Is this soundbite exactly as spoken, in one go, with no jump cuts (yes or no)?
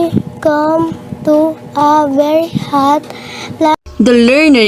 yes